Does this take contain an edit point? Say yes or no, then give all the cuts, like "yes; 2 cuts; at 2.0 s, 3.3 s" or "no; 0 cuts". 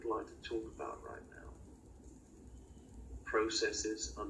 yes; 1 cut; at 1.3 s